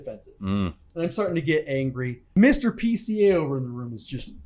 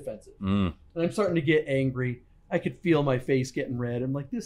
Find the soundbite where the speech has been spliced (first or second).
first